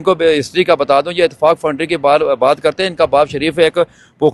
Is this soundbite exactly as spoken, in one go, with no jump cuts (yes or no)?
yes